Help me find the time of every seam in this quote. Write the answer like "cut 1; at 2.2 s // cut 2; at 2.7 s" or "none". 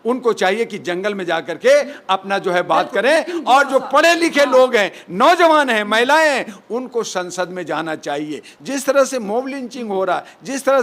cut 1; at 8.5 s